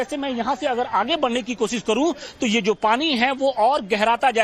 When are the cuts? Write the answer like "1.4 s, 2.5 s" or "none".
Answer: none